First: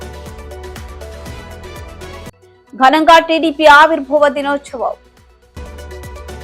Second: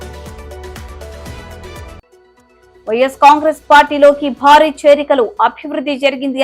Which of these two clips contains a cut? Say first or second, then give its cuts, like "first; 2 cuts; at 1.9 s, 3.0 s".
second; 1 cut; at 1.9 s